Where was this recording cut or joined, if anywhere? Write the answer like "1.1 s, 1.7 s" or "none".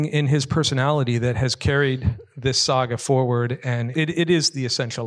3.9 s